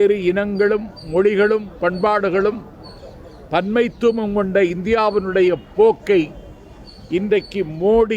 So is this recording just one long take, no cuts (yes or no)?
yes